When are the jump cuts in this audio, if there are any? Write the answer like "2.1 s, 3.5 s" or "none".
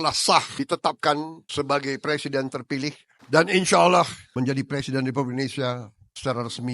3.1 s, 4.2 s